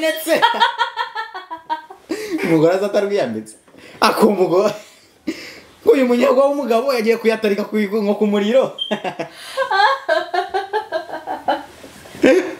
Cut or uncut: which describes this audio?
uncut